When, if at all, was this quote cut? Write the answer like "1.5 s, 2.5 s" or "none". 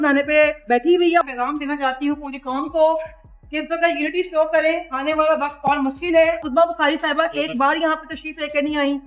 1.3 s, 6.4 s